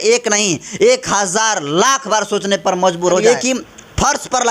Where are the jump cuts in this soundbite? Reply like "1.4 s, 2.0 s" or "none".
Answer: 3.2 s